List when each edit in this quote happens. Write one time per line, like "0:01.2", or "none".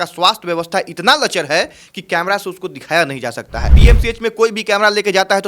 0:03.8